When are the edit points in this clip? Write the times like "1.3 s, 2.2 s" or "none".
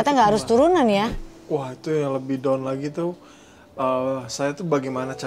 1.3 s